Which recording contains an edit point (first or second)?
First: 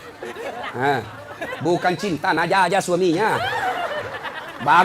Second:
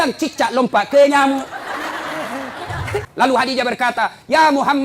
second